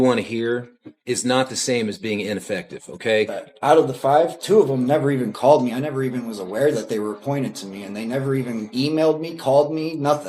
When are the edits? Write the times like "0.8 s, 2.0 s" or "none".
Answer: 3.4 s